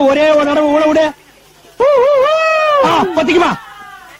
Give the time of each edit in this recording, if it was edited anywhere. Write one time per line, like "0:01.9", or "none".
none